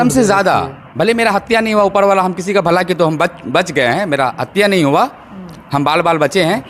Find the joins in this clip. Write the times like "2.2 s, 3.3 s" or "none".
none